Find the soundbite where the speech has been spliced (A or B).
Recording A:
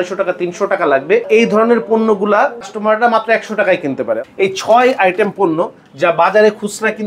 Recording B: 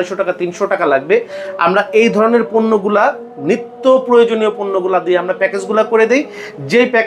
A